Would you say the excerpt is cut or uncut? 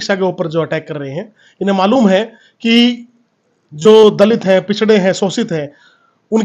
uncut